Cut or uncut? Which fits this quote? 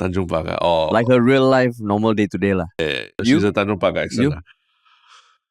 cut